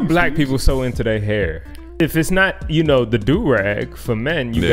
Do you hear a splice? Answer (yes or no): yes